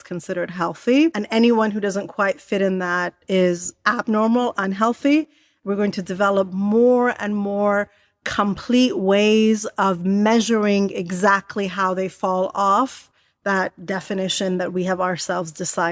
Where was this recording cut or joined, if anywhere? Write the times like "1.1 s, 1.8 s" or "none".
1.2 s, 5.6 s, 13.8 s